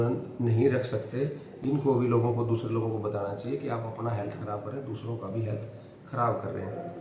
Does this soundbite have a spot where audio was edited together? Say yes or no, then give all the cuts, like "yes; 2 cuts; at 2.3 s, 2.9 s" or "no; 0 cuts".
no; 0 cuts